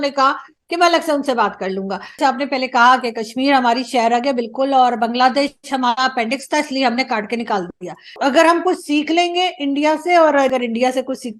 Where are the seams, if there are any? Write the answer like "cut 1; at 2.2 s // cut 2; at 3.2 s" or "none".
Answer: cut 1; at 2.2 s // cut 2; at 8.1 s // cut 3; at 10.5 s